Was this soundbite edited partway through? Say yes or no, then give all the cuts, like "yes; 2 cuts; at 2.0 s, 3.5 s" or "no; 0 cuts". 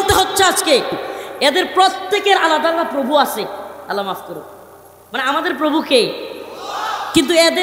yes; 1 cut; at 1.0 s